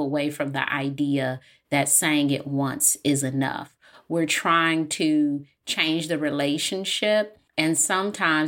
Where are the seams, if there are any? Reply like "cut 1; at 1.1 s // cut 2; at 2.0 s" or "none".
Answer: cut 1; at 7.4 s